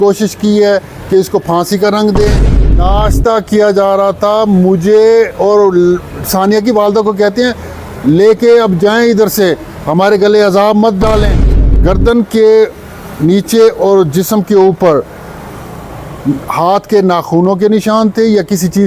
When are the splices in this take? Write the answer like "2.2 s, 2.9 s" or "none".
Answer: 2.7 s, 11.6 s

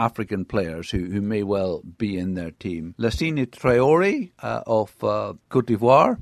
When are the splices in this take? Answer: none

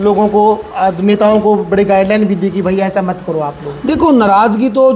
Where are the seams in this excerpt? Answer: none

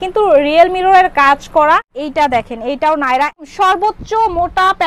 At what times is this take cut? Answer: 1.9 s, 3.5 s

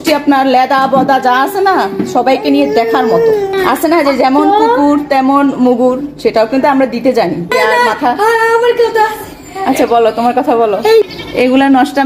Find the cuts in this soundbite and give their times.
3.6 s, 7.5 s, 11.0 s

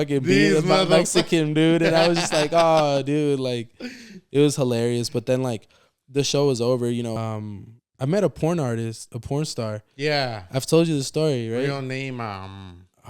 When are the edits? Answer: 7.2 s

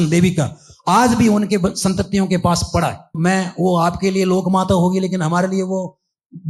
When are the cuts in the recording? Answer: 3.2 s

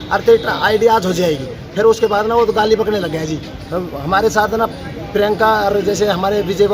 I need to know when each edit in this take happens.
none

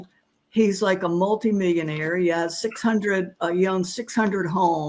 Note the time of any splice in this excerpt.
none

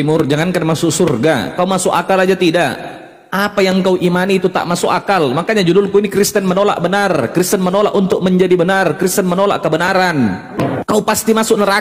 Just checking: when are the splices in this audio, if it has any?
10.6 s

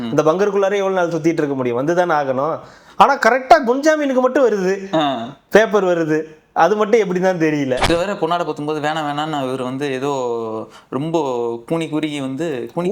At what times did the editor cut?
7.9 s

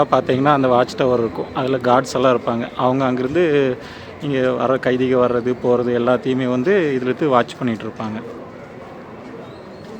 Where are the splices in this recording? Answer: none

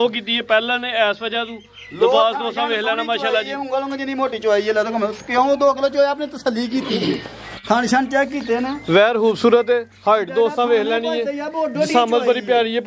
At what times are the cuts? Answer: none

